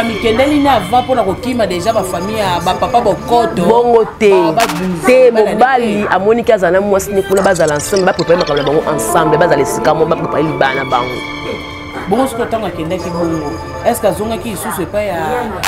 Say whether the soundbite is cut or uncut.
uncut